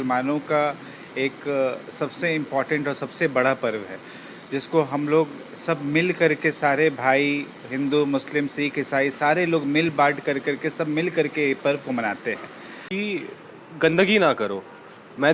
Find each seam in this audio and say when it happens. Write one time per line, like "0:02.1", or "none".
0:12.9